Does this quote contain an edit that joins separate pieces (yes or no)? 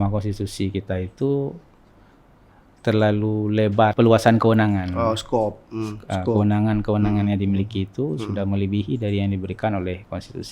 yes